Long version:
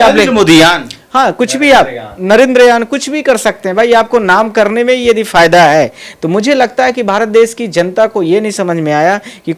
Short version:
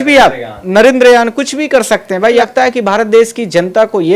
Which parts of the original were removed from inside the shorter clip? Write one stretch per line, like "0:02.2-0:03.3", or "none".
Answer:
0:04.0-0:06.6